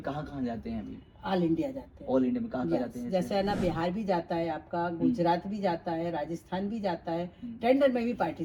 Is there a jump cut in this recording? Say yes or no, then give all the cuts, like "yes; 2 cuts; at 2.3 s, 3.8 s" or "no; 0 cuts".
no; 0 cuts